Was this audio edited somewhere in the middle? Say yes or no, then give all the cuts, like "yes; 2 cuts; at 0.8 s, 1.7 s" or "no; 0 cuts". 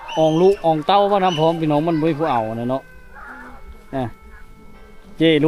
no; 0 cuts